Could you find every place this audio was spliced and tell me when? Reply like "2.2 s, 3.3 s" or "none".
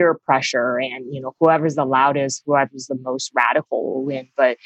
1.3 s